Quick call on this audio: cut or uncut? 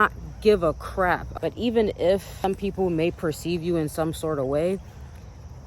cut